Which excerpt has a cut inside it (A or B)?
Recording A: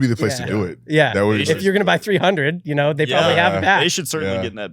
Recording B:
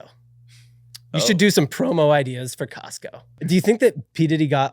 B